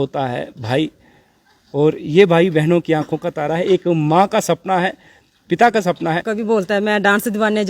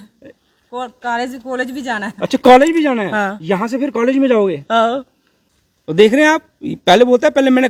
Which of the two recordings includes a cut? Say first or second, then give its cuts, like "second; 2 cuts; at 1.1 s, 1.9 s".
first; 1 cut; at 6.7 s